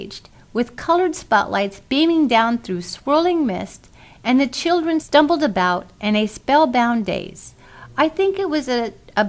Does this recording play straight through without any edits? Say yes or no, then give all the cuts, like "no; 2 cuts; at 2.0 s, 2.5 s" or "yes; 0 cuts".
yes; 0 cuts